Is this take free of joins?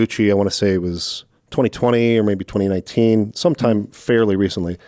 yes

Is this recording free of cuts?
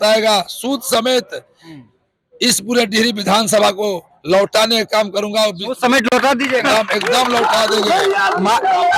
yes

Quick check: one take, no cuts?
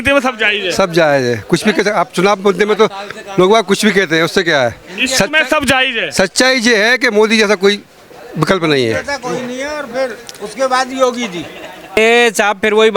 no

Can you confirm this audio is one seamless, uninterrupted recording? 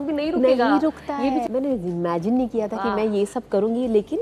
no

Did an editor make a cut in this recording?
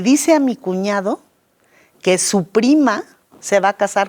no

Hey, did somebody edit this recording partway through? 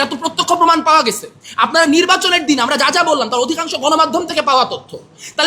no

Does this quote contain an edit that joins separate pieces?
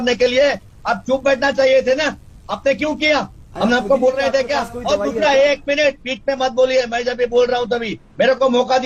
no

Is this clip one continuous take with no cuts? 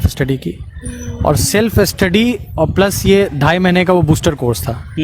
yes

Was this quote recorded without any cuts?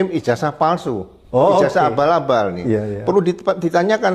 yes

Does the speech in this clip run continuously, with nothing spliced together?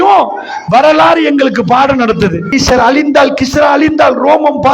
no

